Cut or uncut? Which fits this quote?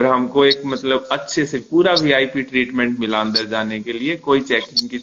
uncut